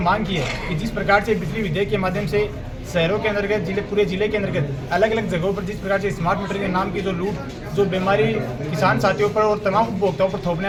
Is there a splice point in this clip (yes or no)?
no